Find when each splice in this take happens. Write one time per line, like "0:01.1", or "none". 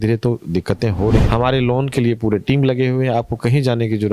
0:01.2